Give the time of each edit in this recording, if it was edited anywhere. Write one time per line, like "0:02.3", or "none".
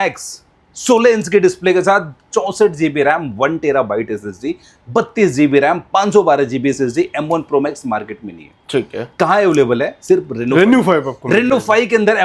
none